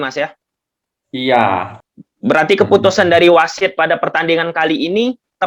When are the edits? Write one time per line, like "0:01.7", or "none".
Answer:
0:01.7